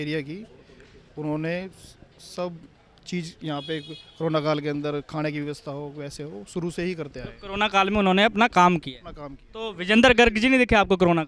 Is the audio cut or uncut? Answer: uncut